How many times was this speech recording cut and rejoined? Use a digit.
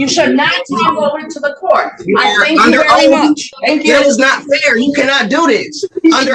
1